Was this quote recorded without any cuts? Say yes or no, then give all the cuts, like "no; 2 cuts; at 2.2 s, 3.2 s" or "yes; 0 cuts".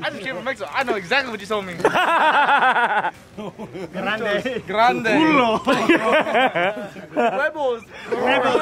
yes; 0 cuts